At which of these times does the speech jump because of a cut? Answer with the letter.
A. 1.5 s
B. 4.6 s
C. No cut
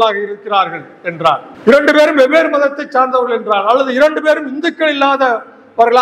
A